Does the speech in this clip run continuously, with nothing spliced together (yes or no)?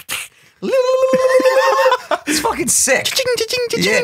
yes